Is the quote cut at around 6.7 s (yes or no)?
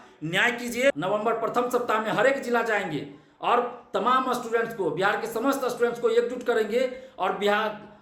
no